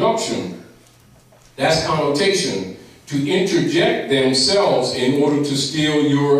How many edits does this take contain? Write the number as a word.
one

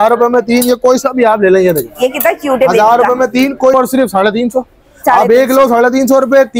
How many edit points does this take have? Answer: one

